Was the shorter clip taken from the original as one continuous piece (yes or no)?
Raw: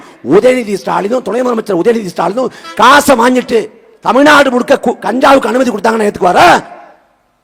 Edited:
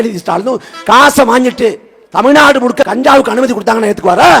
no